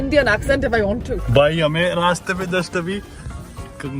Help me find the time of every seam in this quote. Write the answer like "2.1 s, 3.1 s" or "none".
1.1 s